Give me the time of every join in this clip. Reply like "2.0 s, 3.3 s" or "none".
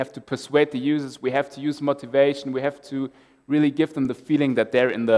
none